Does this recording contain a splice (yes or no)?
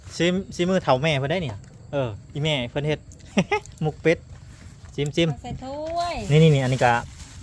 no